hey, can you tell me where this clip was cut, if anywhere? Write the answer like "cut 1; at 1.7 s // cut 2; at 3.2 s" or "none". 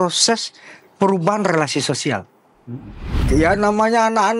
cut 1; at 3.2 s